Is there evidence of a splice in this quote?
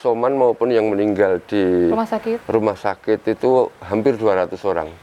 no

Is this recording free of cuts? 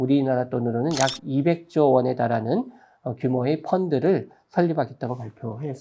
yes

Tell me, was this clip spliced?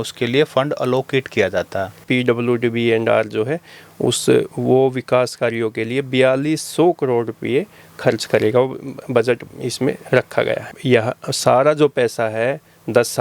yes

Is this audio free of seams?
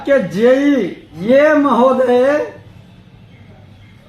no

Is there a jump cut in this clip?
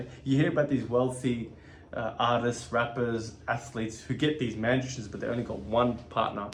no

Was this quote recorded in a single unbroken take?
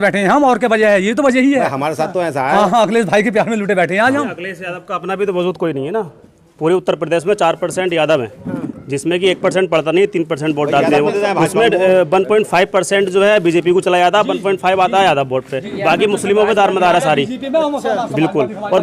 yes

